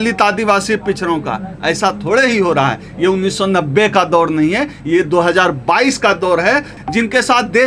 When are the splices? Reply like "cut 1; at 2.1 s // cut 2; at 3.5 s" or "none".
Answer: cut 1; at 6.7 s